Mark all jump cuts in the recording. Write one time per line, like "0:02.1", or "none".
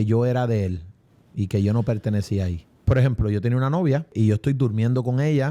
0:02.7
0:04.1